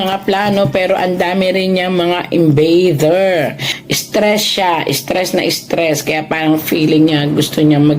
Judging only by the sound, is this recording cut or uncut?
cut